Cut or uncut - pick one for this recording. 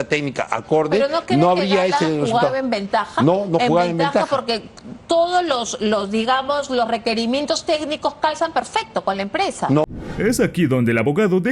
uncut